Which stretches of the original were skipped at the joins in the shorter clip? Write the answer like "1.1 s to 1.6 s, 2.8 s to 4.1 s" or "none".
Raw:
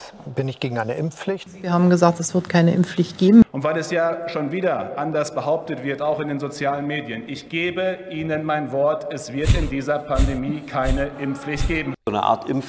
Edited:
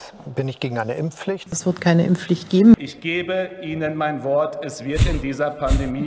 1.5 s to 2.2 s, 3.5 s to 7.3 s